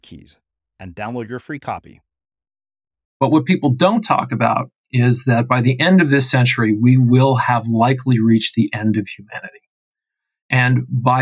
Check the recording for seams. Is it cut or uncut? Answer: cut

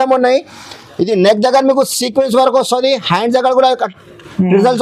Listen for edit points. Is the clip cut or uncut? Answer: uncut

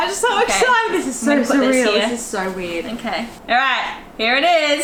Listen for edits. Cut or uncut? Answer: uncut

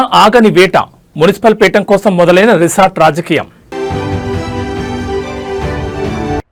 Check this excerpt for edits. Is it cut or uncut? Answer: uncut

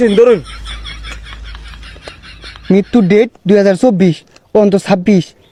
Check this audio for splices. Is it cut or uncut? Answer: uncut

